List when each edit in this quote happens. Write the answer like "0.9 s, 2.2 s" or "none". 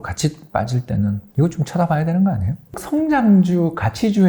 1.3 s, 2.8 s